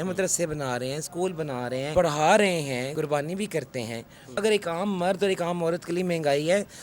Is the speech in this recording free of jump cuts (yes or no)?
no